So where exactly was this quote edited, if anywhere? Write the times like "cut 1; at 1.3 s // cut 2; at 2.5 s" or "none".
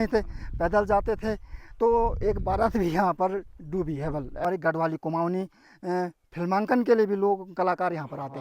cut 1; at 4.4 s